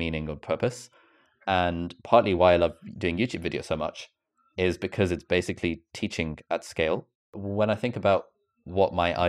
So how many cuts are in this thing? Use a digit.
1